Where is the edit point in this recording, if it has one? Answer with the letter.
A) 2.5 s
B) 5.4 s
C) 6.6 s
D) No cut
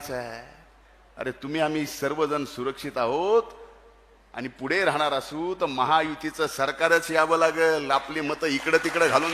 D